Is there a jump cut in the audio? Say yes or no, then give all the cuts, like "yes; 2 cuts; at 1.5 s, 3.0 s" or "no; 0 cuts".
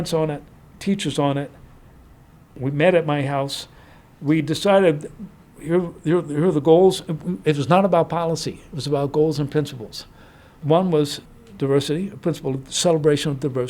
yes; 1 cut; at 2.6 s